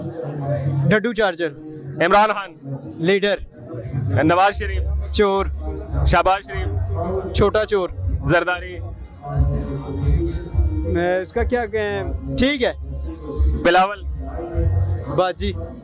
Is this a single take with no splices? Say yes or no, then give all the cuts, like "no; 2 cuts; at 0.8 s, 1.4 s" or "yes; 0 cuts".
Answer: yes; 0 cuts